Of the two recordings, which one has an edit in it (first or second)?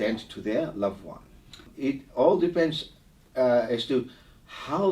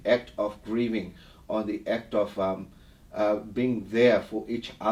first